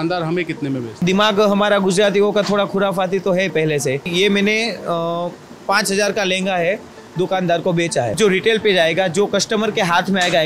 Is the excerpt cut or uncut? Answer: cut